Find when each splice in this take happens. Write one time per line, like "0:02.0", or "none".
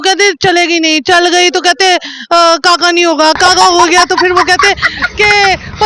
none